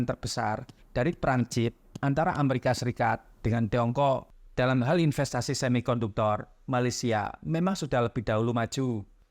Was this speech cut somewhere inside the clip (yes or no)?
yes